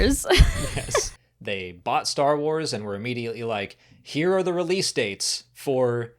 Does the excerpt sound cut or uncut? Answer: cut